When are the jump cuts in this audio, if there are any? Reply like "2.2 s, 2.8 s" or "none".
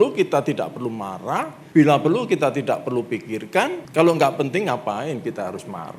1.6 s, 3.8 s